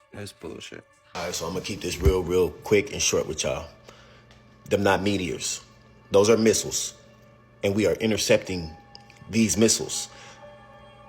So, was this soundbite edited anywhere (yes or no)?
yes